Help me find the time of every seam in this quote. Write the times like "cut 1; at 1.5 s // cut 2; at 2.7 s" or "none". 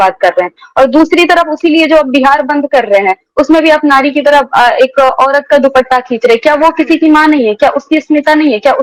none